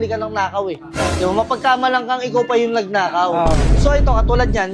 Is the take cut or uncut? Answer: uncut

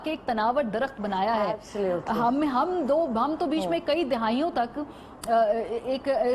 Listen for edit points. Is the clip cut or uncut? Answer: uncut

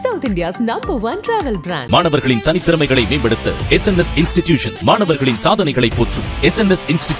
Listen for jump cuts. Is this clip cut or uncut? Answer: uncut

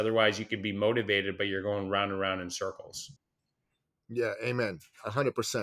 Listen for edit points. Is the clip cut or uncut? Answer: uncut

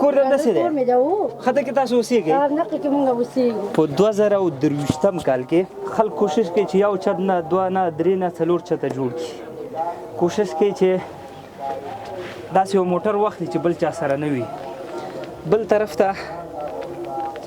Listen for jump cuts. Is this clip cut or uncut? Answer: cut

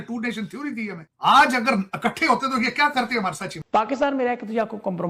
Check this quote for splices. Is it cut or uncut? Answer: cut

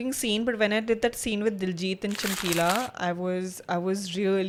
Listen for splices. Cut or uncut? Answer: uncut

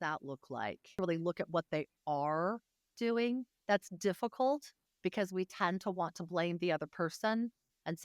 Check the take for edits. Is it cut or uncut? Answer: cut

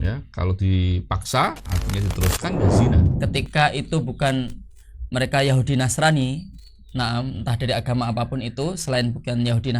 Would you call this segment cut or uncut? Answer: cut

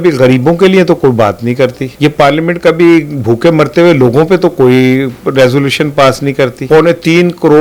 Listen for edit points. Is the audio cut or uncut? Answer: cut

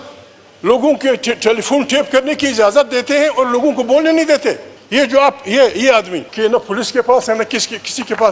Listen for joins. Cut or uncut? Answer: cut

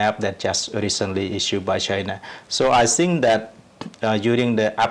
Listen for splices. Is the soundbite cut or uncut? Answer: uncut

